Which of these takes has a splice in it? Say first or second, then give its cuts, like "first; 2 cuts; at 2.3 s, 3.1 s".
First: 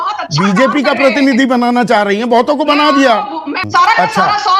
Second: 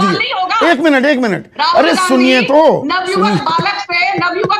first; 1 cut; at 3.6 s